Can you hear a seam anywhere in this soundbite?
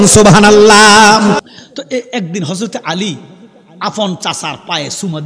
yes; 1 cut; at 1.4 s

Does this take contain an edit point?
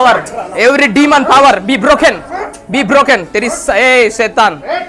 no; 0 cuts

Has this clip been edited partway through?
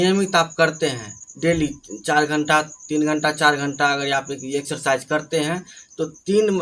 no; 0 cuts

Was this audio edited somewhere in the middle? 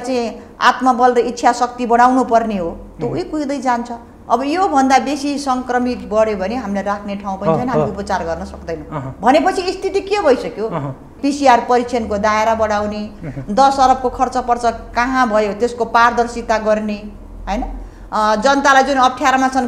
yes; 2 cuts; at 4.1 s, 11.1 s

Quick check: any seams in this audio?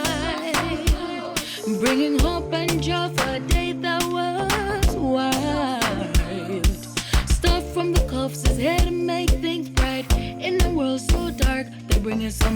no; 0 cuts

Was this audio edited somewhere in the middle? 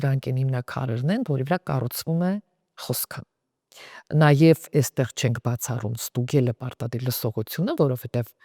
no; 0 cuts

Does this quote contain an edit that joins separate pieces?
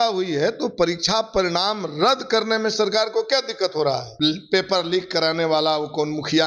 yes; 1 cut; at 4.1 s

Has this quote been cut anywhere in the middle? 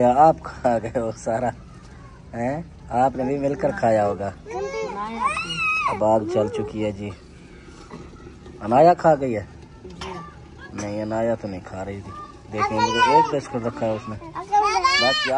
no; 0 cuts

